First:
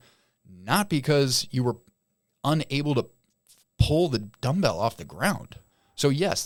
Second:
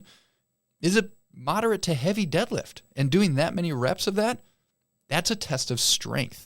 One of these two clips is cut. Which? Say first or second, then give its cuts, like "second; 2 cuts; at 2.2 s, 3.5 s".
second; 1 cut; at 2.8 s